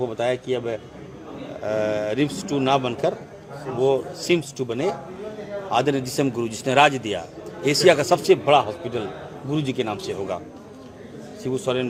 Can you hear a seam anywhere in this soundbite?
no; 0 cuts

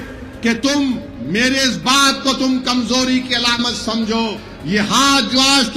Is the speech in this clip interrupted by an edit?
yes; 1 cut; at 4.5 s

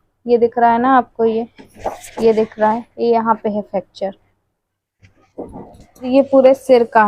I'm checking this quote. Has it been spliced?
yes; 1 cut; at 6.1 s

